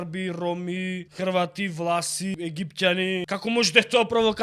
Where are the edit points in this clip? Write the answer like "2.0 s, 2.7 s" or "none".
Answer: 1.1 s, 2.3 s, 3.3 s